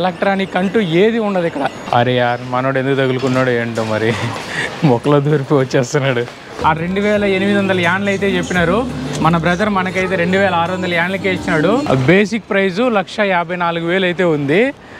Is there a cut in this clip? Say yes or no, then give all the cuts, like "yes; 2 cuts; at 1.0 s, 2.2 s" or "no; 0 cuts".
yes; 3 cuts; at 1.8 s, 6.5 s, 11.9 s